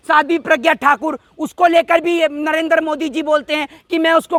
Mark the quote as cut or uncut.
uncut